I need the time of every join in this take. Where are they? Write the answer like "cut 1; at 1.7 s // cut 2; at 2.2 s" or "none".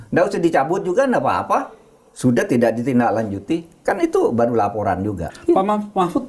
cut 1; at 5.3 s